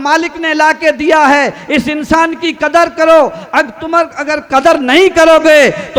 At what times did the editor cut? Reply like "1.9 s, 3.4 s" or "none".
none